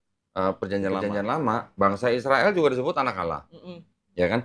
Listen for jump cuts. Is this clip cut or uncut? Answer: cut